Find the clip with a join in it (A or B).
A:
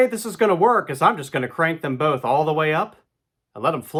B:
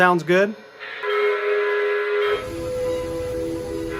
B